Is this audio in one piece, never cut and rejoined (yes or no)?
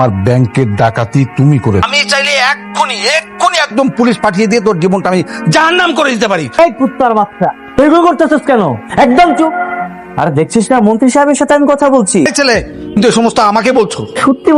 no